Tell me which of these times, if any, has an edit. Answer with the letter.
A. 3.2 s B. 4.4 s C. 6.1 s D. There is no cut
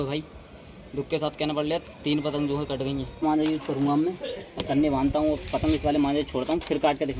A